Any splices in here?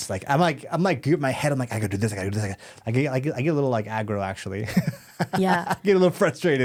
no; 0 cuts

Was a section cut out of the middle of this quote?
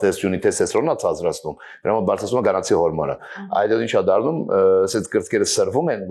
no; 0 cuts

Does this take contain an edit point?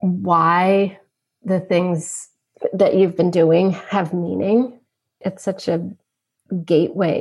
yes; 2 cuts; at 2.5 s, 5.2 s

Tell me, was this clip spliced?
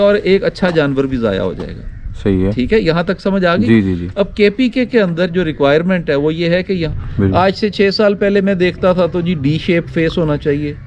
yes; 1 cut; at 6.9 s

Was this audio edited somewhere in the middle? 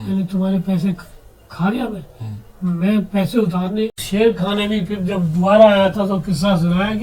yes; 1 cut; at 4.0 s

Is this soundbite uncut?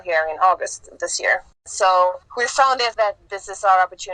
no; 2 cuts; at 1.6 s, 2.5 s

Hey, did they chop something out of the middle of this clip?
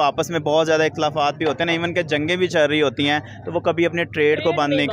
no; 0 cuts

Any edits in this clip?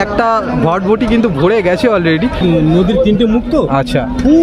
yes; 1 cut; at 2.4 s

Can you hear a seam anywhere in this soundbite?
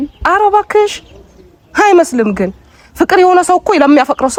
no; 0 cuts

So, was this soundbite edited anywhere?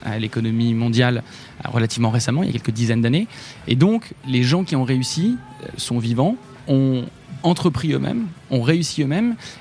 yes; 2 cuts; at 4.2 s, 6.7 s

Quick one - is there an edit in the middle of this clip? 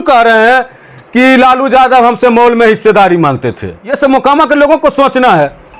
yes; 1 cut; at 3.9 s

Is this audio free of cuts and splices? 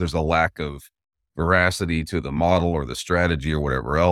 yes; 0 cuts

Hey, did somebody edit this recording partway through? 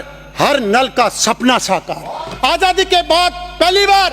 yes; 1 cut; at 2.2 s

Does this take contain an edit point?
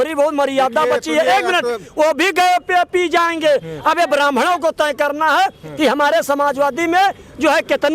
no; 0 cuts

